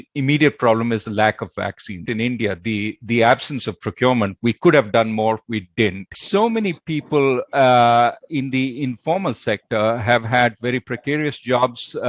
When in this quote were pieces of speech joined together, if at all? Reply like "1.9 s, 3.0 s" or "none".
1.9 s, 6.1 s